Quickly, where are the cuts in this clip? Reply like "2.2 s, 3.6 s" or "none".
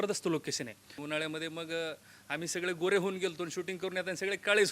1.0 s